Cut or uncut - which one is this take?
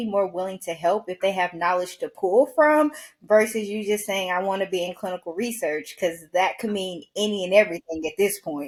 uncut